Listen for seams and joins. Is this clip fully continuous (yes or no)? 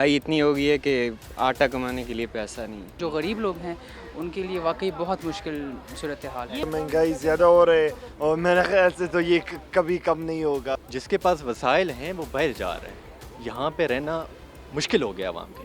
no